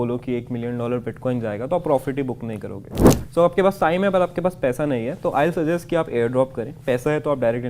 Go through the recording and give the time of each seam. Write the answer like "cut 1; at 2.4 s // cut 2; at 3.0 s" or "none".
cut 1; at 3.1 s